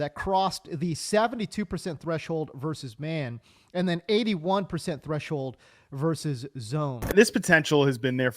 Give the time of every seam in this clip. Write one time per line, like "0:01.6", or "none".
0:07.1